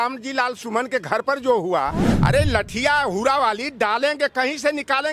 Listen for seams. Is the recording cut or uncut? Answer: cut